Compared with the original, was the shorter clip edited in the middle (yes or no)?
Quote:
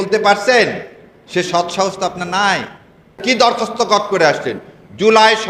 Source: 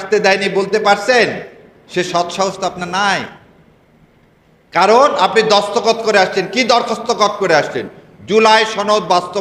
yes